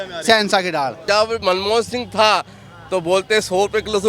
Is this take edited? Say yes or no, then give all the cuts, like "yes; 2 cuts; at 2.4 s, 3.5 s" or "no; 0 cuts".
yes; 1 cut; at 1.0 s